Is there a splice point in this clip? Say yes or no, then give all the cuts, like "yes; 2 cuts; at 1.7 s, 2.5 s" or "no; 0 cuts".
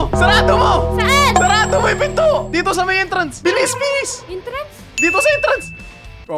no; 0 cuts